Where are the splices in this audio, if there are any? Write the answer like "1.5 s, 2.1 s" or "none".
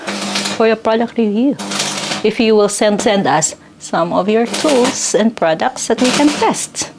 3.0 s